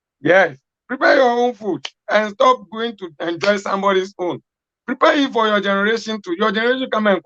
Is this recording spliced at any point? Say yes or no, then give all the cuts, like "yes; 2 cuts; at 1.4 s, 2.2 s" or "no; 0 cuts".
no; 0 cuts